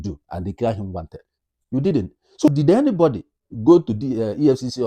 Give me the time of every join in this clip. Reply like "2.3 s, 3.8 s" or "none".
2.5 s